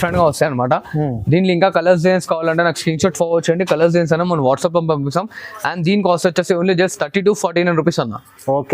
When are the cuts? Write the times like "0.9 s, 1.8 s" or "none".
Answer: none